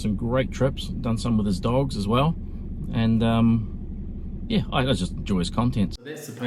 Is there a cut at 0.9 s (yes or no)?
no